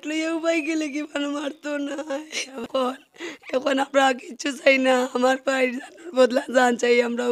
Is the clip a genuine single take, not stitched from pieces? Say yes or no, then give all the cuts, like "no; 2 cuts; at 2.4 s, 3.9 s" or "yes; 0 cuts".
no; 1 cut; at 2.5 s